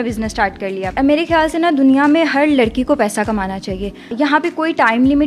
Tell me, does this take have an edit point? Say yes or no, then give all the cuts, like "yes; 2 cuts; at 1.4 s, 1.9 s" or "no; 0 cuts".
yes; 2 cuts; at 0.9 s, 4.1 s